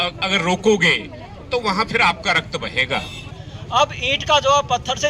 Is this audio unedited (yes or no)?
no